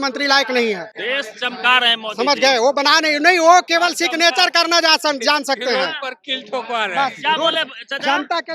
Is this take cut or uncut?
cut